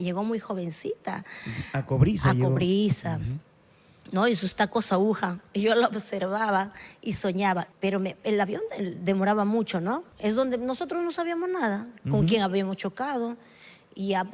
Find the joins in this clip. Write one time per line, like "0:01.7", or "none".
0:07.7
0:10.1